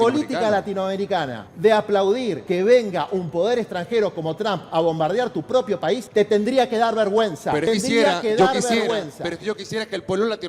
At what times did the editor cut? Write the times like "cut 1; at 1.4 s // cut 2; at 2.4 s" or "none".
cut 1; at 1.4 s // cut 2; at 2.4 s // cut 3; at 6.0 s // cut 4; at 7.7 s